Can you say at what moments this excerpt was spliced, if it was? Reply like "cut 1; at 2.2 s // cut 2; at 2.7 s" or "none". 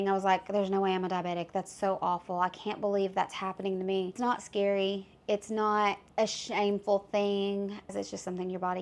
cut 1; at 4.2 s // cut 2; at 6.0 s // cut 3; at 7.9 s